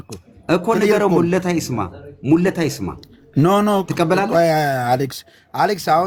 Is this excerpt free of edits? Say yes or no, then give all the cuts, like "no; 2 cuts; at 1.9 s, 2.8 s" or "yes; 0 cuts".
yes; 0 cuts